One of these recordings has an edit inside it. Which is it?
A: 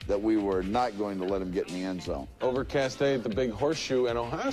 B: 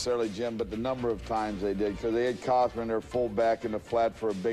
A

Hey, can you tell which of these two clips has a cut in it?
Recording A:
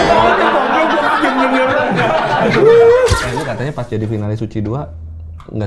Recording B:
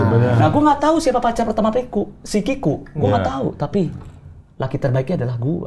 A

